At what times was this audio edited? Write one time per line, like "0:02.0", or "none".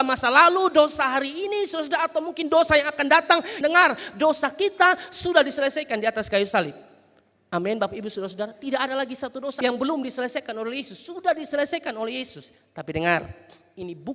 0:03.5